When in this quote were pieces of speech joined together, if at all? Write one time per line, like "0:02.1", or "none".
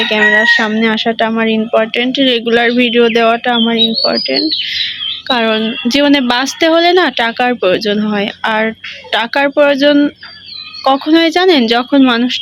none